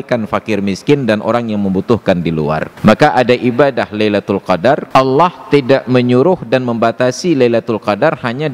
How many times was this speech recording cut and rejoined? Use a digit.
2